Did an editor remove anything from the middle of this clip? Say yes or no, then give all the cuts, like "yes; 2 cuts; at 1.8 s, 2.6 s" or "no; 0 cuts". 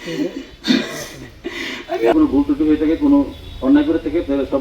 yes; 1 cut; at 2.1 s